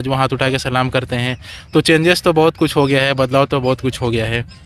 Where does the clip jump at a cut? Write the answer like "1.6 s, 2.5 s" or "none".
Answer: none